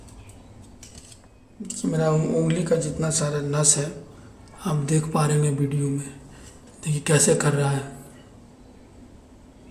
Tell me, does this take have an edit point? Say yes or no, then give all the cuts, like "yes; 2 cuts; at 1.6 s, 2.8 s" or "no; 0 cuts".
yes; 1 cut; at 1.4 s